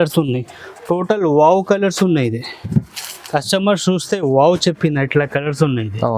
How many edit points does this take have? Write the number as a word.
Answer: zero